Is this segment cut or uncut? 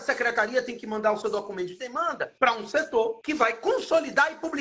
cut